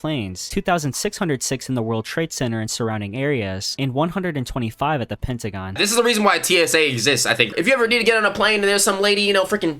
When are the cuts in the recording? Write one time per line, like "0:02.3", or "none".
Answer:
0:05.7
0:07.5